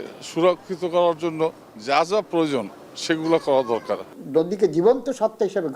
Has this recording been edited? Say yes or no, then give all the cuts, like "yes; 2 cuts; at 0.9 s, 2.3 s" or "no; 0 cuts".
yes; 1 cut; at 4.1 s